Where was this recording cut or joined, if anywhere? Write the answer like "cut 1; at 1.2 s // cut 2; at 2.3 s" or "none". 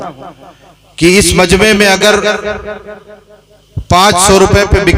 none

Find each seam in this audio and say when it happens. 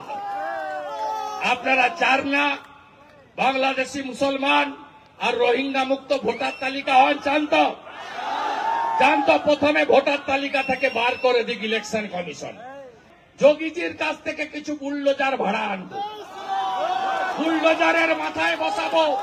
cut 1; at 13.0 s

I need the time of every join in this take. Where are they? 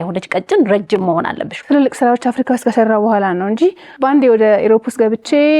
cut 1; at 1.5 s // cut 2; at 3.9 s

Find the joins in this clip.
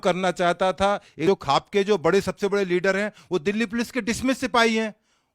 cut 1; at 1.2 s

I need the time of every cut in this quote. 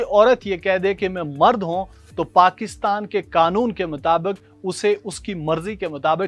none

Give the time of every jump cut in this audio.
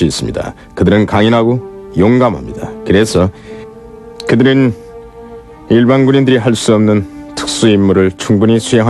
cut 1; at 7.7 s

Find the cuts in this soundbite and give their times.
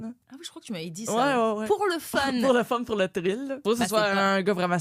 cut 1; at 3.5 s

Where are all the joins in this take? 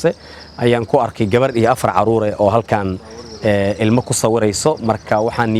none

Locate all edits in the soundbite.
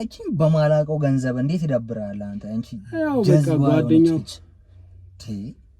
none

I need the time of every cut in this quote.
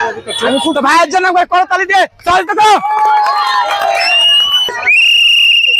cut 1; at 4.8 s

